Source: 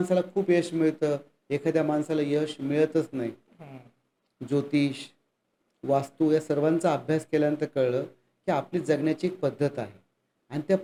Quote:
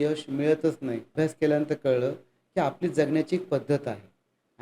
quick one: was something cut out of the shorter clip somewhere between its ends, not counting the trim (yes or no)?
yes